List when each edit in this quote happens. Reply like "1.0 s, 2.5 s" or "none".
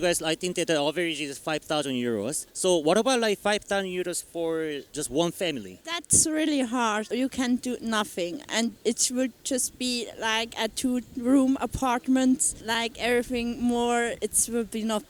none

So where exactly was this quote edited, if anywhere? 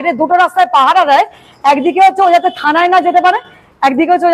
none

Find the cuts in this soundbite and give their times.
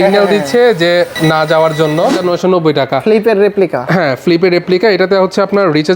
1.1 s, 2.2 s

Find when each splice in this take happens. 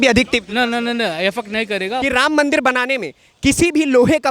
2.0 s

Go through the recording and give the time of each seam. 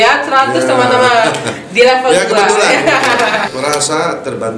3.5 s

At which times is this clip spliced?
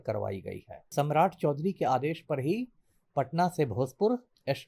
0.9 s

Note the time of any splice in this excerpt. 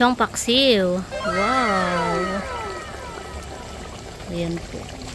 none

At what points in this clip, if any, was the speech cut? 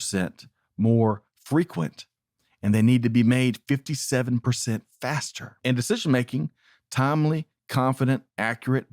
5.6 s

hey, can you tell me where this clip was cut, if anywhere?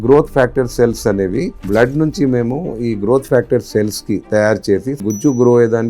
1.6 s, 5.0 s

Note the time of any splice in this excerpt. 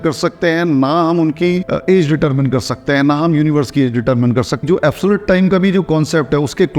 4.6 s

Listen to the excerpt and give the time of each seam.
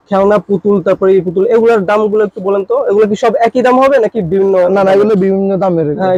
none

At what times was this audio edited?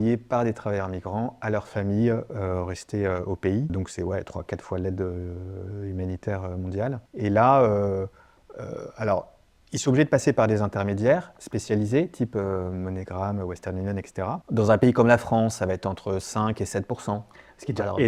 3.7 s, 7.1 s, 14.4 s

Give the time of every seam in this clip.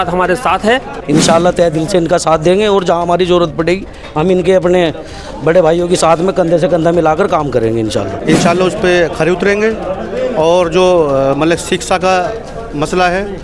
0.9 s, 8.1 s

